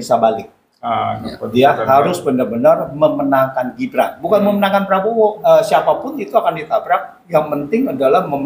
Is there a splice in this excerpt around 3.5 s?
no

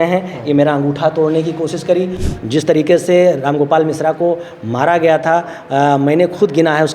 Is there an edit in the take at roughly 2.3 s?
yes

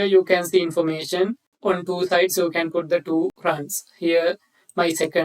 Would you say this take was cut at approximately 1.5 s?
yes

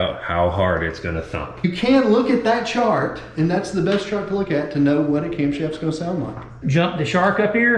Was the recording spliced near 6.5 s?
yes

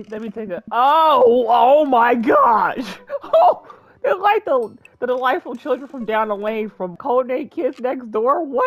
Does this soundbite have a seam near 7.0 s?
yes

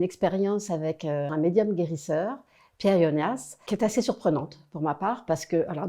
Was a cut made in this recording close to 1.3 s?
yes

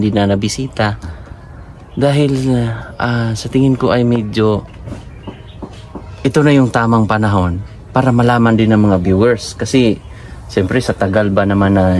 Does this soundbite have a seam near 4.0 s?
no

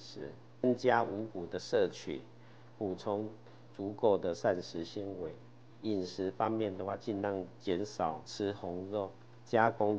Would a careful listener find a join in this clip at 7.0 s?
no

